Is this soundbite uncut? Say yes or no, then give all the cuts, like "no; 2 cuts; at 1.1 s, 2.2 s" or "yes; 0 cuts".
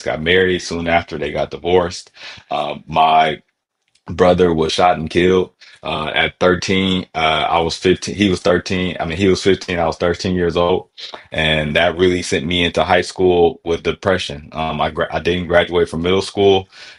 yes; 0 cuts